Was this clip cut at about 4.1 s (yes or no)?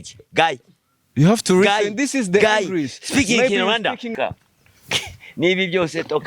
yes